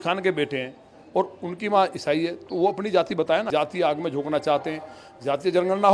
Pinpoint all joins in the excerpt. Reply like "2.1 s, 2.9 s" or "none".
3.5 s